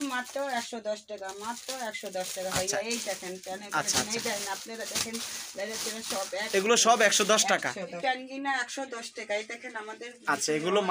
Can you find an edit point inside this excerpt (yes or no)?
no